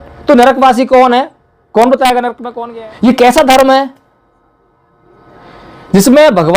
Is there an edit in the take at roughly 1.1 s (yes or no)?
no